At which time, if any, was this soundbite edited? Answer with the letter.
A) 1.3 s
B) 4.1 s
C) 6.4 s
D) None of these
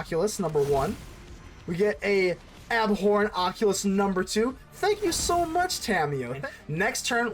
C